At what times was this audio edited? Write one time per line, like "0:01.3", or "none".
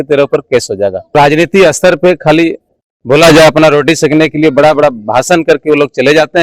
0:01.1